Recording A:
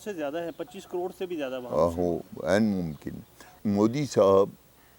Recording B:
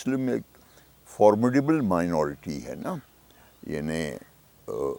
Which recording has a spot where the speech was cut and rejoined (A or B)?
A